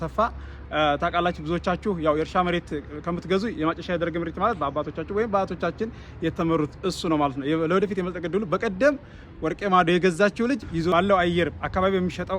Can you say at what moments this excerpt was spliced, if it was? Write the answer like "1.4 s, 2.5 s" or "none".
10.7 s